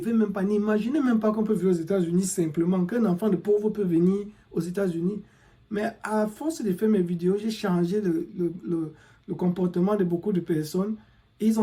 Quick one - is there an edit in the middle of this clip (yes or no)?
no